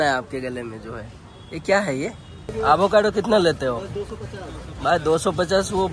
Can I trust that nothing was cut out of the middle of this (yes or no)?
no